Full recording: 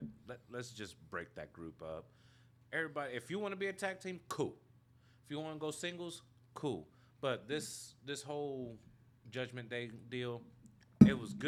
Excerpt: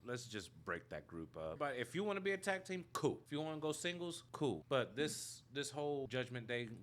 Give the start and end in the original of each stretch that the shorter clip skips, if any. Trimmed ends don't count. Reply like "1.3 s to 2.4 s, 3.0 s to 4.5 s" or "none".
2.0 s to 2.9 s, 4.6 s to 5.2 s, 6.4 s to 7.0 s, 8.6 s to 9.3 s